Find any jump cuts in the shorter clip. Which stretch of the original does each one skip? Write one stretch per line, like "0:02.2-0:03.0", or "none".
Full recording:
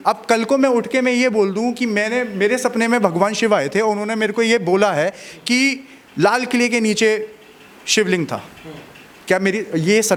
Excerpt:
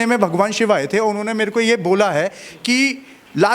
none